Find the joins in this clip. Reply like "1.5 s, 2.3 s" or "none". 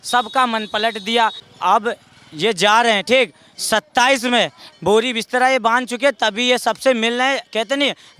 1.4 s